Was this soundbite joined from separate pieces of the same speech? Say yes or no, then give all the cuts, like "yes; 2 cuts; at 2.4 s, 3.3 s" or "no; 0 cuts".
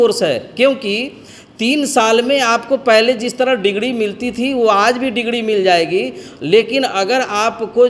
no; 0 cuts